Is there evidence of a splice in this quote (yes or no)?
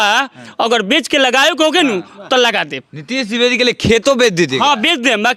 no